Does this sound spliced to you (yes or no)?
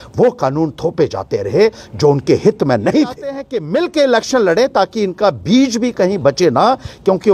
yes